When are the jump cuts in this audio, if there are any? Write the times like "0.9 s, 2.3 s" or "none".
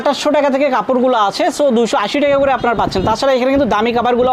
none